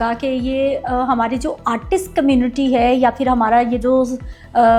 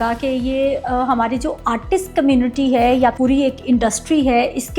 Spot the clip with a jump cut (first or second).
second